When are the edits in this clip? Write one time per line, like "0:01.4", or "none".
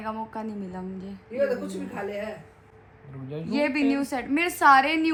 none